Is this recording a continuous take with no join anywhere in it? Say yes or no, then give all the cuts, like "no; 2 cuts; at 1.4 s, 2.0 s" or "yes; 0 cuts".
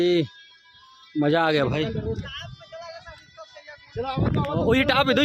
yes; 0 cuts